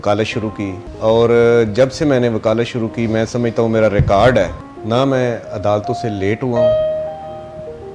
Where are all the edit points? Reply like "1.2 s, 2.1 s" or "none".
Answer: none

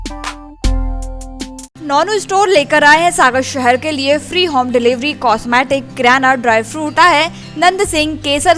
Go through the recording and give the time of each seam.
1.7 s, 6.9 s

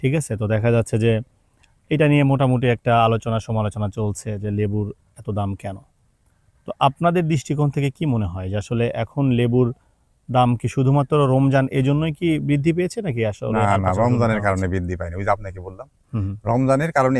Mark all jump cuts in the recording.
none

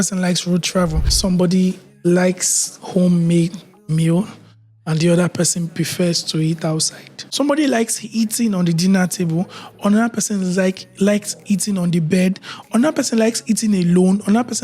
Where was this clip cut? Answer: 1.1 s, 7.2 s

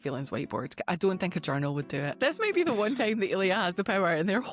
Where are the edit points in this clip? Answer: 2.1 s

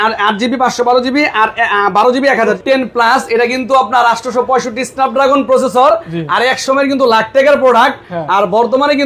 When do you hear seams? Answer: 2.6 s

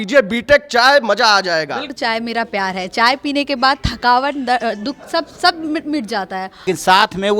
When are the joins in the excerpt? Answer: 1.8 s, 6.6 s

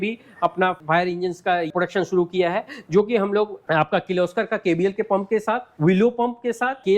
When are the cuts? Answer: 3.7 s

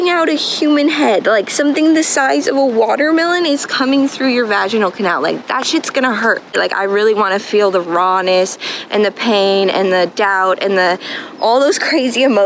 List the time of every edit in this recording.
6.6 s

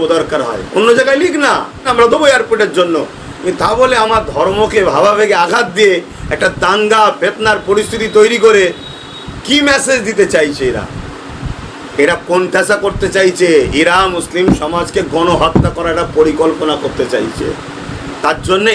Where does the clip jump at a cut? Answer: 1.9 s

